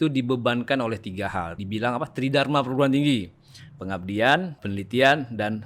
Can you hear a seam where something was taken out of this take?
yes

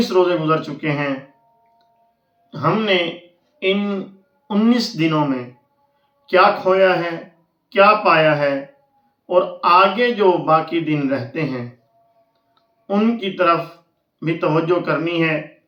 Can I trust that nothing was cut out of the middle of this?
yes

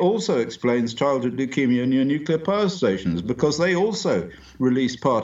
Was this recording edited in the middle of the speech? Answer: no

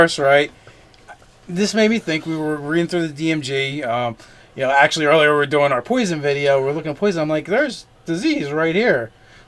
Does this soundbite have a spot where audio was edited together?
yes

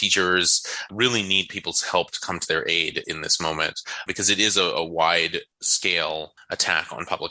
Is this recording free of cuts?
yes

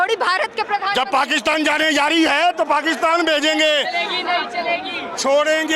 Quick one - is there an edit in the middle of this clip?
no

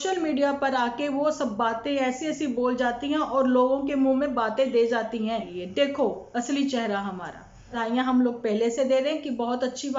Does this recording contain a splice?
yes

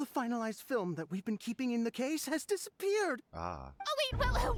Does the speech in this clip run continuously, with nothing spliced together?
yes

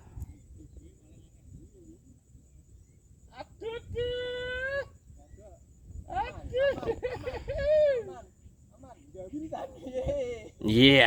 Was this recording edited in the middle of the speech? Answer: no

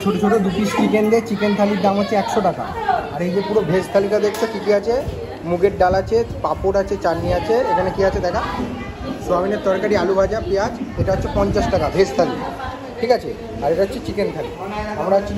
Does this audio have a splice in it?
no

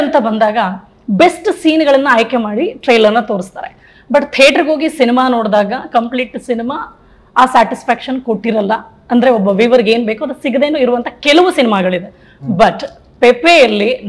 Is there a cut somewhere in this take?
no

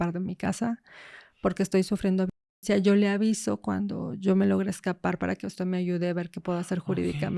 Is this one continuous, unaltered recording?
yes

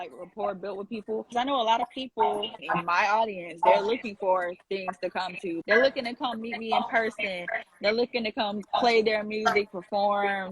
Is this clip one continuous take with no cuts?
no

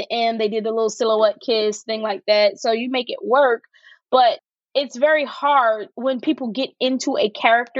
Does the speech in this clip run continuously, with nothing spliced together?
no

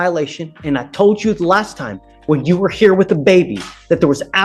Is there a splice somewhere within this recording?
no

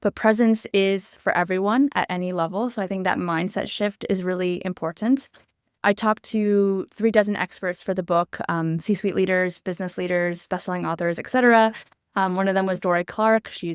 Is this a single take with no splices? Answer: no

